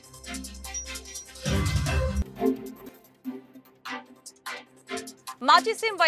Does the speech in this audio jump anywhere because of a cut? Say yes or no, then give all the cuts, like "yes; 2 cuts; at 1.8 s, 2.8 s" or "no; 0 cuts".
yes; 1 cut; at 1.0 s